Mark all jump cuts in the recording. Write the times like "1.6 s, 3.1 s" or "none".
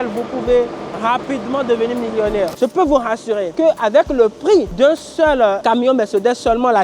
2.5 s